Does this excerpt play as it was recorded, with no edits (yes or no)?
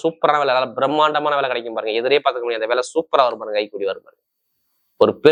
yes